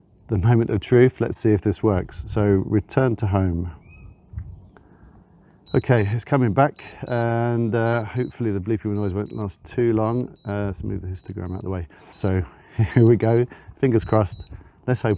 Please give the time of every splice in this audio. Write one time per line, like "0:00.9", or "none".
0:05.3
0:12.1